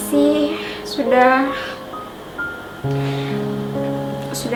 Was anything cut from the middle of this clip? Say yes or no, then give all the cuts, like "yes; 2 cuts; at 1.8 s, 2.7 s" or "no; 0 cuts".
no; 0 cuts